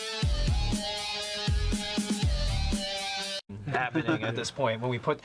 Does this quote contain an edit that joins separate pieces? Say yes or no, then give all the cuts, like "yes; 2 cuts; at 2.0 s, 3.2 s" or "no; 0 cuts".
no; 0 cuts